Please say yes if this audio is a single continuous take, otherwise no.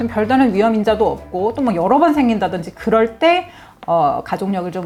yes